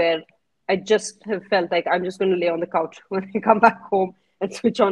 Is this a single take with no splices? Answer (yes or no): yes